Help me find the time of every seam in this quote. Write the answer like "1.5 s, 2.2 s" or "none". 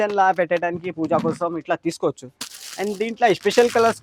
none